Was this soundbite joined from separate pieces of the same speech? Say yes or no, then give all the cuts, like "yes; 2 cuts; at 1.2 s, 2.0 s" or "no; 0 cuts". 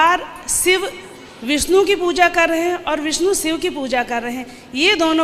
no; 0 cuts